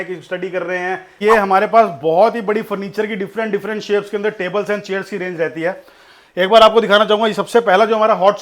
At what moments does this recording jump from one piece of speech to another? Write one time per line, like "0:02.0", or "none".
0:01.2